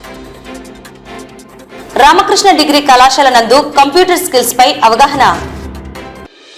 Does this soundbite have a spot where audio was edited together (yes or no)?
no